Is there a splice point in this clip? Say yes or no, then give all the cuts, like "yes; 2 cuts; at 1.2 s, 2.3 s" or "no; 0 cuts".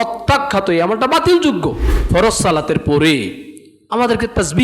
yes; 1 cut; at 1.9 s